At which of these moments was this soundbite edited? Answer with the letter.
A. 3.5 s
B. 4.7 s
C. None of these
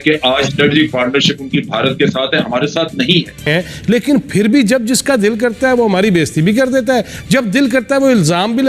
A